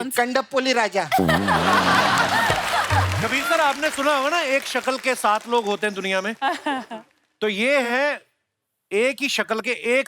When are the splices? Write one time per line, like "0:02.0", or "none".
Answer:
0:03.2